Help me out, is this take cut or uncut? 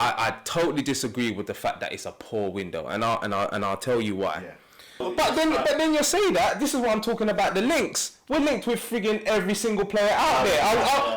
cut